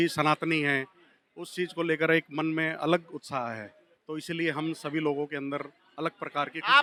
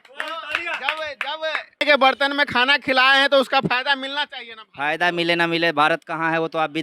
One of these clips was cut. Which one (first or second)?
second